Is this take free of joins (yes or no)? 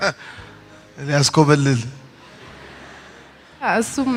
yes